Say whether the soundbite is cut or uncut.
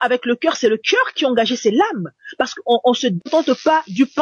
cut